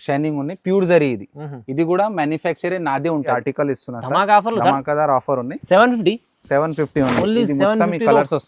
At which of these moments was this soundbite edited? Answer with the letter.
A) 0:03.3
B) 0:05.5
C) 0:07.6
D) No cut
A